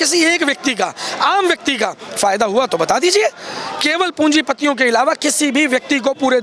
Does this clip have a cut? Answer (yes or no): no